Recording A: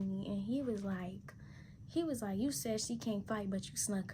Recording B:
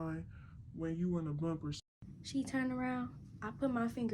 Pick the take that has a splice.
B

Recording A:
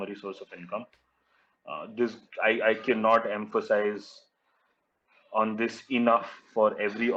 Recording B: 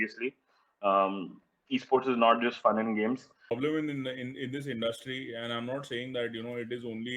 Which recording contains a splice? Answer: B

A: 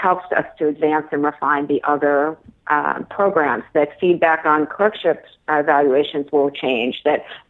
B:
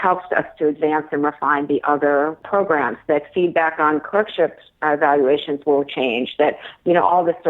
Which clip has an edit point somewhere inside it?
B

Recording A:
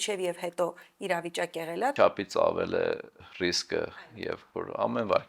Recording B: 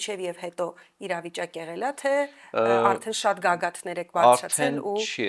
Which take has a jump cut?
A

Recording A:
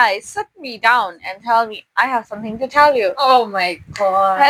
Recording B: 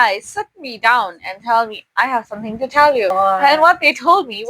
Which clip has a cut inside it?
B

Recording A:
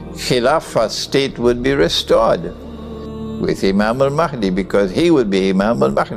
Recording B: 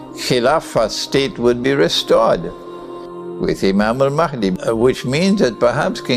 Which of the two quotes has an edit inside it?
B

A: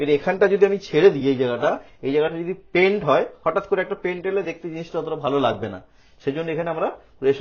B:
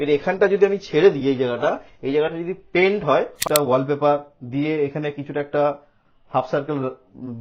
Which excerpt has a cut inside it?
B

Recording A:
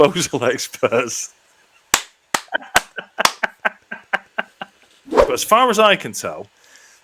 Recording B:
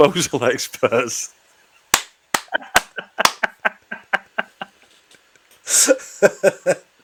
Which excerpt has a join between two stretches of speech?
A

